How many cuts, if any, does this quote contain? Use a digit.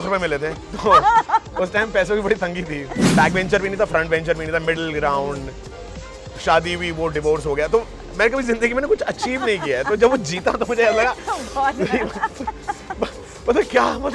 1